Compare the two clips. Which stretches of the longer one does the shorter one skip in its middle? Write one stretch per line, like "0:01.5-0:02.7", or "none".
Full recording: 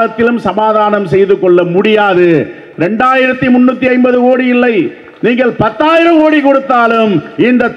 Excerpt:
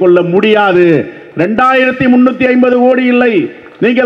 none